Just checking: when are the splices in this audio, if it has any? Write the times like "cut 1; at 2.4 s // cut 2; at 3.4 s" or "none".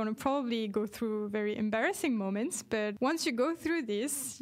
cut 1; at 2.9 s